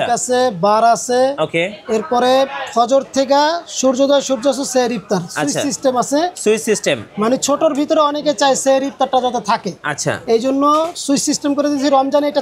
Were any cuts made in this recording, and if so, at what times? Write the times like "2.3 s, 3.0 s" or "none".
none